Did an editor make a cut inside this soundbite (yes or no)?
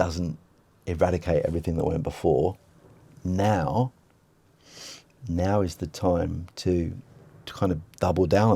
no